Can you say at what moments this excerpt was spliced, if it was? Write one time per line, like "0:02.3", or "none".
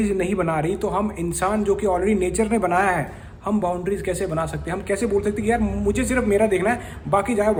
none

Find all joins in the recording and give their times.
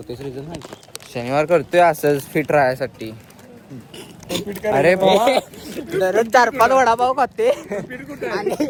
none

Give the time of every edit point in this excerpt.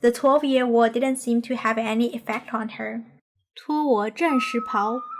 none

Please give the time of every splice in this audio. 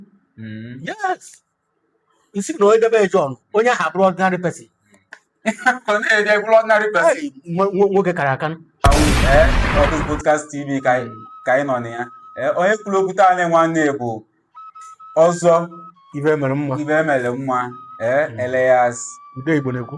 0:08.9

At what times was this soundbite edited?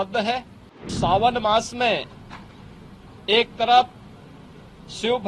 0:00.9

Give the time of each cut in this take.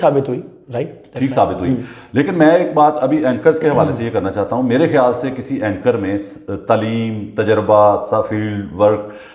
none

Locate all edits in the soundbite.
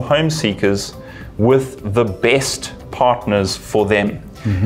none

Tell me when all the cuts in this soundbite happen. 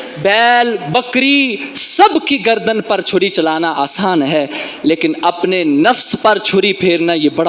none

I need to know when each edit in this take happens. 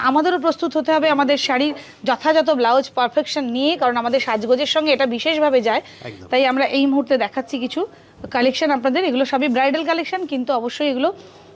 none

